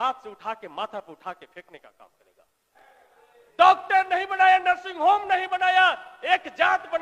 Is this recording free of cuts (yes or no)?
no